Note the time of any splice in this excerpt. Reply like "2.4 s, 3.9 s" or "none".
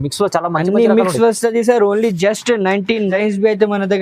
3.1 s

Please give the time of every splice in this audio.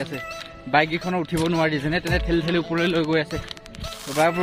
none

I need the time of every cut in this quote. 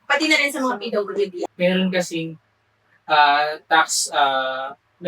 1.5 s

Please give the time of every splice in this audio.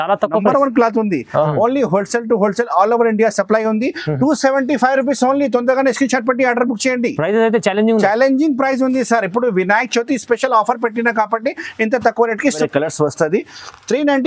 1.5 s, 12.6 s

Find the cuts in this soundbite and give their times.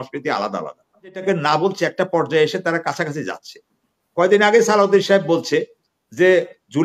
1.2 s

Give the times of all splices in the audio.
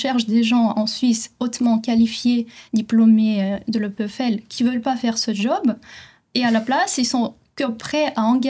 none

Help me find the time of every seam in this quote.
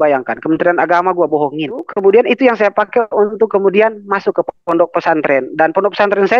1.9 s

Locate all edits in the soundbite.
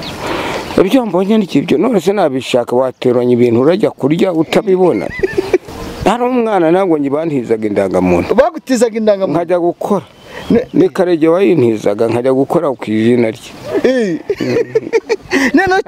5.6 s

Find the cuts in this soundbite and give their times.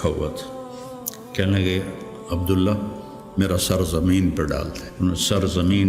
4.8 s

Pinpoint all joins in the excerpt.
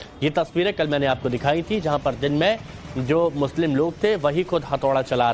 none

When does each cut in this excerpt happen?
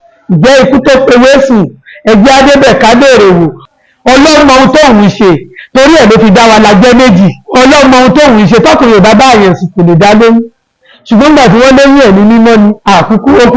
3.6 s

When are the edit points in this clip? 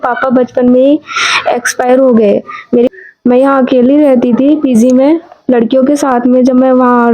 2.9 s

